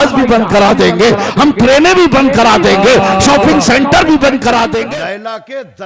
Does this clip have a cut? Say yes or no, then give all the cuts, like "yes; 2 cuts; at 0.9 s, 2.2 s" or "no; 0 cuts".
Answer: yes; 1 cut; at 4.8 s